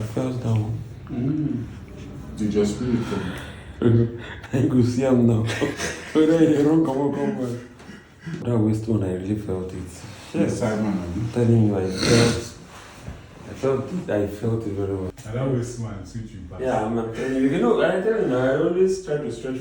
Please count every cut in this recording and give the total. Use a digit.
2